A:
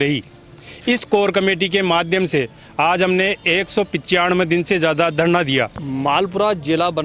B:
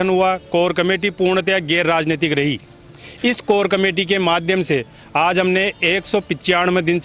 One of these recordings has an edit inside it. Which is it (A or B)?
A